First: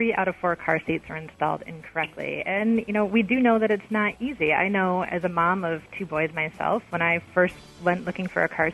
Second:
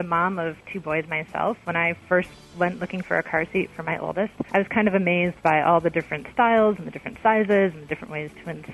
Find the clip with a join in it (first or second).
second